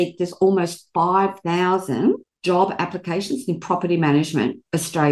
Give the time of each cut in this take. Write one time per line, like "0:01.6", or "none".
0:02.3